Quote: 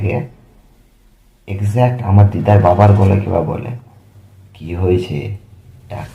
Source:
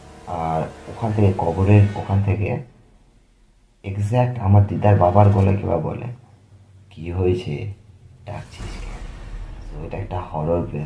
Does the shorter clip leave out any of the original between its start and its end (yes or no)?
no